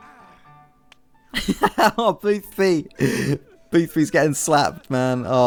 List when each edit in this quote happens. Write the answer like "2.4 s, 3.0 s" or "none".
none

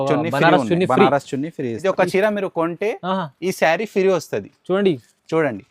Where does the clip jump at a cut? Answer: 1.7 s

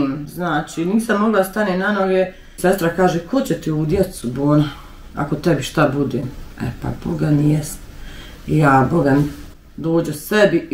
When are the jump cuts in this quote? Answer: 2.5 s

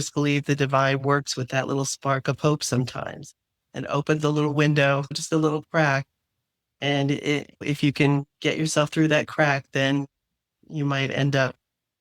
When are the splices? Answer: 5.1 s, 7.6 s

